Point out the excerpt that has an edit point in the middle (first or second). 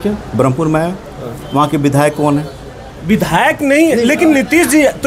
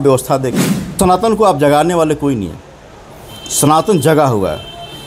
second